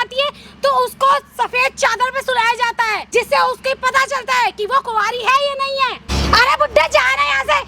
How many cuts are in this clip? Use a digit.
2